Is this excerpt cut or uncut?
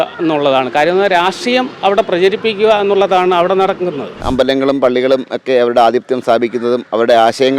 cut